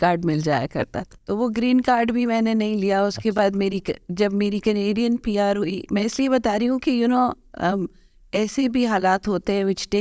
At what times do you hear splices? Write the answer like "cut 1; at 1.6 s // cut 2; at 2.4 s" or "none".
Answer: cut 1; at 1.0 s